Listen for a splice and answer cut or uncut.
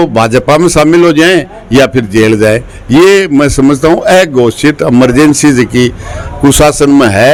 uncut